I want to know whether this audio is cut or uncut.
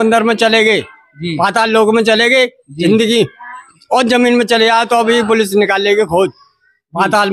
uncut